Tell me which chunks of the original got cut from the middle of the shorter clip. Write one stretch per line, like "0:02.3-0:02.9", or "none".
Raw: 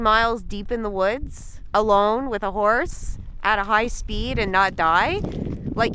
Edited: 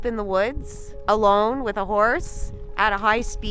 none